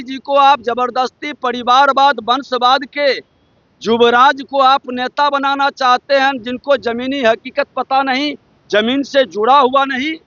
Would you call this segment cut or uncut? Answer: uncut